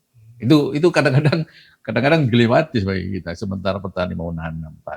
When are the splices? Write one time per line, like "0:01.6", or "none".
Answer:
none